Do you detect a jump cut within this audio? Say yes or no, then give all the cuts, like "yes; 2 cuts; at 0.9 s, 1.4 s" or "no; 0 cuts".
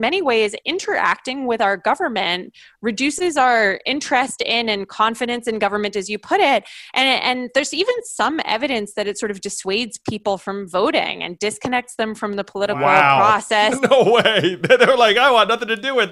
no; 0 cuts